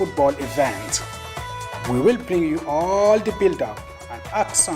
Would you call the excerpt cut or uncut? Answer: cut